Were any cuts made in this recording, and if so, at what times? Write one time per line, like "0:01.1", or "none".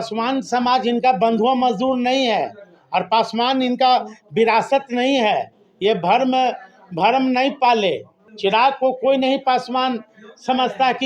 none